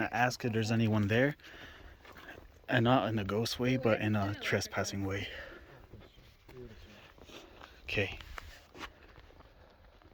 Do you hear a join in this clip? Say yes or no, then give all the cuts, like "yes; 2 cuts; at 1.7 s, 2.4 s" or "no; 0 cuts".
no; 0 cuts